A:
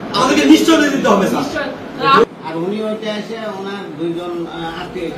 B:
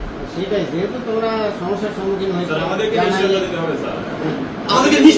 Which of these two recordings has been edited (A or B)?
A